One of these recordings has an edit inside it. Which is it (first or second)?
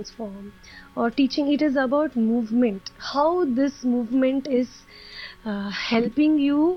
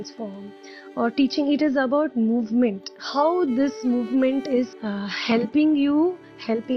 second